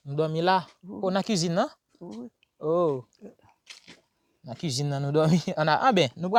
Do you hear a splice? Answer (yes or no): no